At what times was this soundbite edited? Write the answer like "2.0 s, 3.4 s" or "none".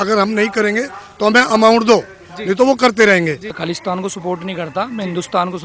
3.5 s